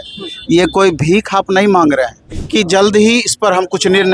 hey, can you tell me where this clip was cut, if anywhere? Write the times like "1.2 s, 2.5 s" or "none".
2.2 s